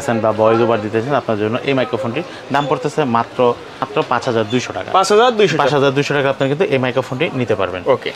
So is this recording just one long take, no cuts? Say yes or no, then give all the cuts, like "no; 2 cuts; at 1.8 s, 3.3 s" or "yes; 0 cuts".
yes; 0 cuts